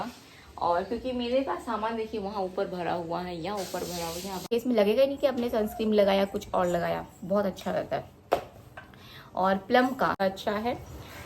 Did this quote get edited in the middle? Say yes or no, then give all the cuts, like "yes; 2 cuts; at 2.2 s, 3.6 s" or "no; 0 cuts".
yes; 2 cuts; at 4.5 s, 10.2 s